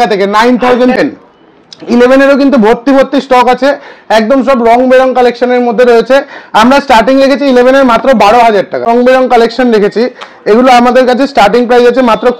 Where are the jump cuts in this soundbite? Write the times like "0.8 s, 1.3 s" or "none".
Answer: 1.0 s, 8.9 s